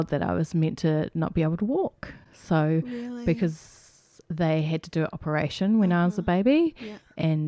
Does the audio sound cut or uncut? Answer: uncut